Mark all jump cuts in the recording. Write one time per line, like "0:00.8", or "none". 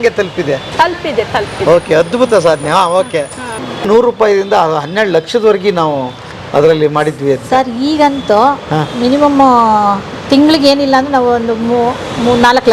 0:03.7